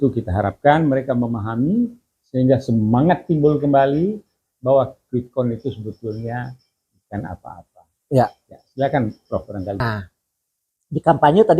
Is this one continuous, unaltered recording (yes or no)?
no